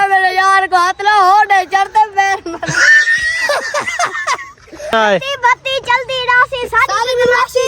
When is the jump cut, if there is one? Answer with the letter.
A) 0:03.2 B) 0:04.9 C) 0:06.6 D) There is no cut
B